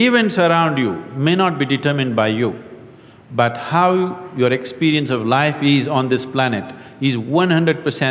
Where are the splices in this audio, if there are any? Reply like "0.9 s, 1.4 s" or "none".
none